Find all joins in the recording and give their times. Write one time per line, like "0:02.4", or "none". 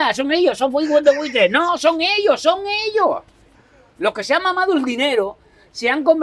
none

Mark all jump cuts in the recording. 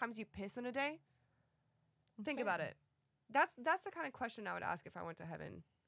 none

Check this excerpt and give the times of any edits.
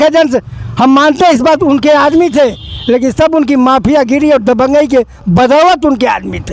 none

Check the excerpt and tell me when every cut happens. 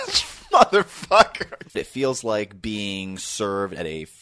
0:01.9

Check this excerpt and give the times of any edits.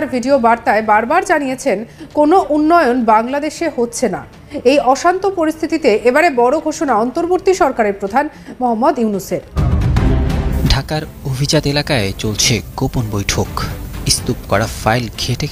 0:09.6

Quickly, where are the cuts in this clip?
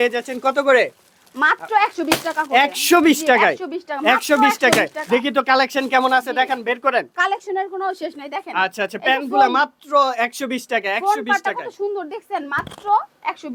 none

